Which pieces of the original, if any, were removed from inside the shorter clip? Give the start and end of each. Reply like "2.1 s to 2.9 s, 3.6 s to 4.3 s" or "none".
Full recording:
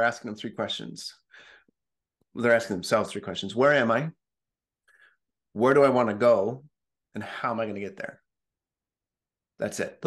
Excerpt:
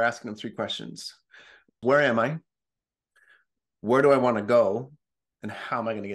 1.7 s to 3.4 s